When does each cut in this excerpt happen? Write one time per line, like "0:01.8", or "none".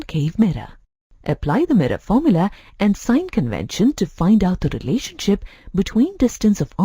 0:01.2